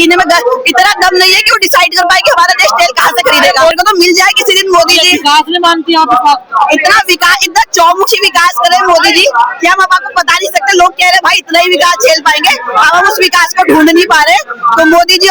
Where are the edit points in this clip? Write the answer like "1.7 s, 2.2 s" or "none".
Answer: 3.7 s